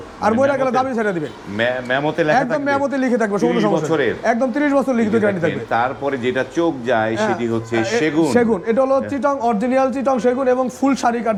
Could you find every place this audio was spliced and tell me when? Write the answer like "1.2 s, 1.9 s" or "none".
none